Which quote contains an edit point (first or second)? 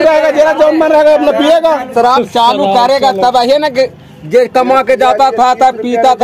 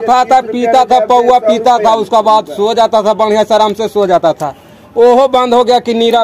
first